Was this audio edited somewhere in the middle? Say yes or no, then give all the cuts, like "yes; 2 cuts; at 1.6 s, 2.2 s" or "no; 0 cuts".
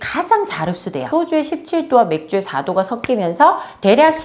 yes; 1 cut; at 1.1 s